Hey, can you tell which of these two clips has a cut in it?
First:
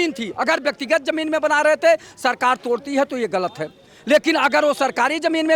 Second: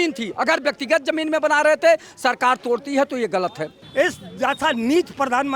second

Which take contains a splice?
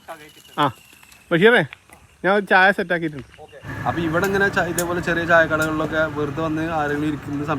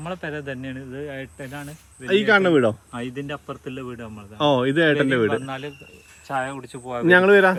first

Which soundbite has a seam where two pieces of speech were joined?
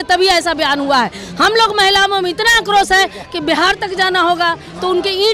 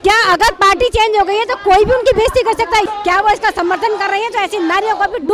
second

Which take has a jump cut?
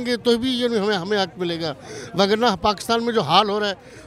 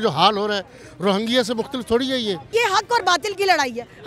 second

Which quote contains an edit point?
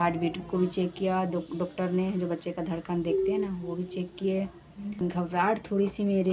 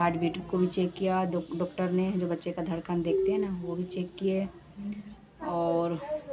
first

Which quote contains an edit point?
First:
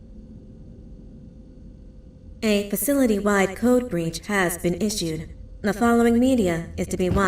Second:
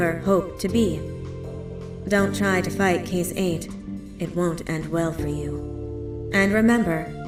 first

